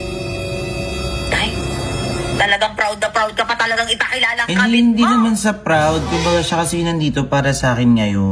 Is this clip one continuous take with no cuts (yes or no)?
yes